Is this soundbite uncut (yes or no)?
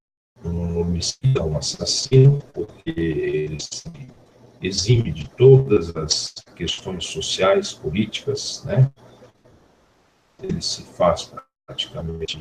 yes